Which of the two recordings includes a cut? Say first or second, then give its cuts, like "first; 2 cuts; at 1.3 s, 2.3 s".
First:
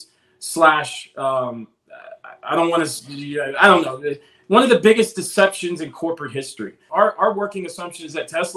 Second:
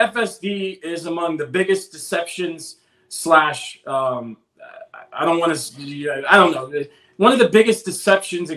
first; 1 cut; at 6.8 s